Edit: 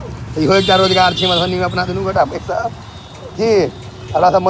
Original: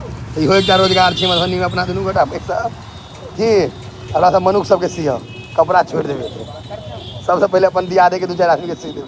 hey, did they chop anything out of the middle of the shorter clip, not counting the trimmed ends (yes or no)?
no